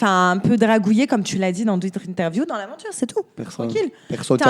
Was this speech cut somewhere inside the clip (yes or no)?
no